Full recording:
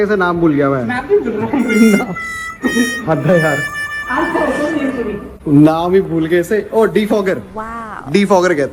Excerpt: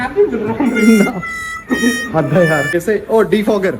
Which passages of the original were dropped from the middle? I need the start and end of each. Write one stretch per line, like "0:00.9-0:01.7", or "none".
0:03.7-0:06.4